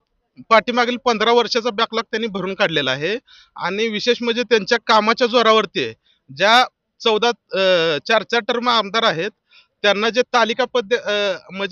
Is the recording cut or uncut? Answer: uncut